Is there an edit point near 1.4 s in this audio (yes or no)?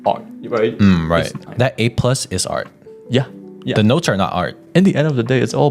yes